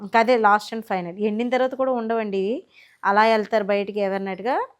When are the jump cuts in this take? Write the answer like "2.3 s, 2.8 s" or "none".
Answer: none